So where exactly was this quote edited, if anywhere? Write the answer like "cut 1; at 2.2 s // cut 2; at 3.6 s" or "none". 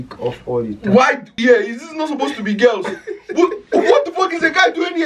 cut 1; at 1.4 s